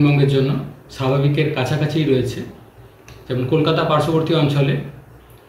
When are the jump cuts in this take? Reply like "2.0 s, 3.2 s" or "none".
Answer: none